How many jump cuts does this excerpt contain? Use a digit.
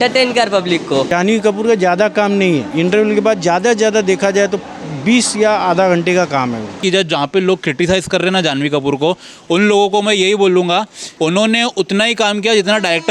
4